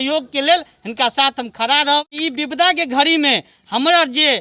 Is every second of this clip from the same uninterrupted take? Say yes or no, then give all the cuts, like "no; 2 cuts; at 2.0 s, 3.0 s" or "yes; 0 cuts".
no; 1 cut; at 2.1 s